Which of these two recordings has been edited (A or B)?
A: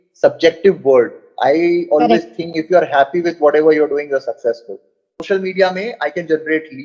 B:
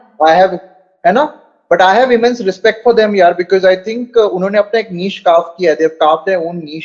A